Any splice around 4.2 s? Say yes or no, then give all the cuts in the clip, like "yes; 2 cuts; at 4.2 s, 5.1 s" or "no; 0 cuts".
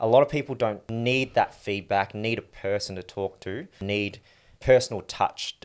yes; 2 cuts; at 0.9 s, 4.2 s